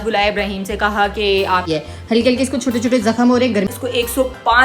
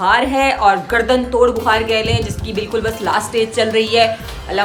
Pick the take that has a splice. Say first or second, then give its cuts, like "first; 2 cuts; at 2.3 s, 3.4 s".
first; 2 cuts; at 1.6 s, 3.7 s